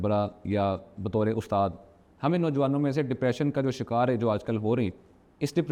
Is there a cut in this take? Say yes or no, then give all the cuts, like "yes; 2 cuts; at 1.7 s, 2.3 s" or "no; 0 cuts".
no; 0 cuts